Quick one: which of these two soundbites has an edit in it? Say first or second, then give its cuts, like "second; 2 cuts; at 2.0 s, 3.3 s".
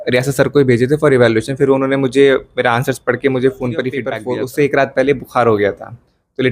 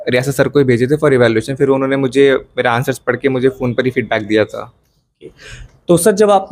first; 1 cut; at 4.2 s